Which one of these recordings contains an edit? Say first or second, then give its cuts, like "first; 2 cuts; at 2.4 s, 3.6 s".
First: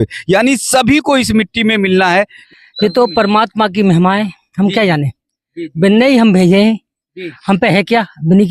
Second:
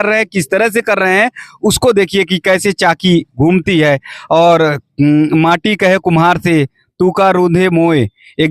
first; 1 cut; at 2.4 s